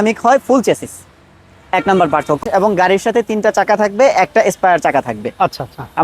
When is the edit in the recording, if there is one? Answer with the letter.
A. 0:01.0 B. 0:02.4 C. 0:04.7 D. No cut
B